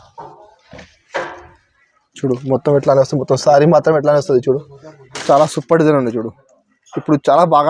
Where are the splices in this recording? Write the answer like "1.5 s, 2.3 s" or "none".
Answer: none